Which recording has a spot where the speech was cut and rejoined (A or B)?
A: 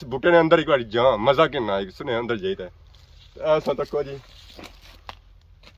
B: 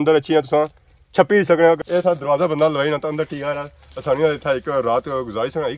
B